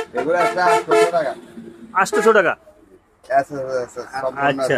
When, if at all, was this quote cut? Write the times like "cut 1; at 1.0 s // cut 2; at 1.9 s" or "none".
none